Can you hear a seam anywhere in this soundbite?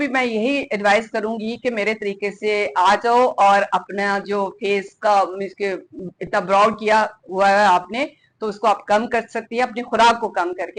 no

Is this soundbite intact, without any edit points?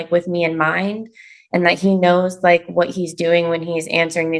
yes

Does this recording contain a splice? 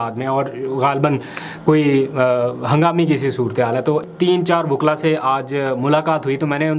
yes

